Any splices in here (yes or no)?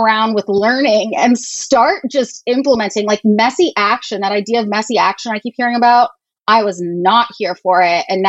no